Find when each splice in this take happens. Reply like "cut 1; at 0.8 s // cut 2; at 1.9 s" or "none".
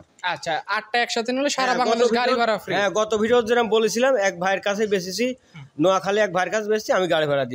none